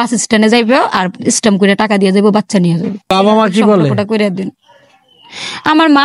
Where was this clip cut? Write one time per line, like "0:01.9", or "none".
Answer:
0:03.1